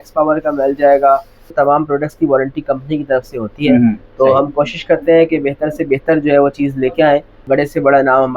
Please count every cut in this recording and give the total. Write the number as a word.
two